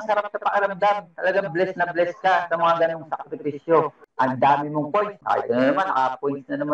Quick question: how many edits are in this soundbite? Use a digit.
2